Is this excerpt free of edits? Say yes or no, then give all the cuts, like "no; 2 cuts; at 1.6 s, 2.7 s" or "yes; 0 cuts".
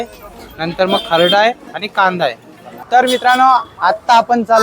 no; 1 cut; at 2.8 s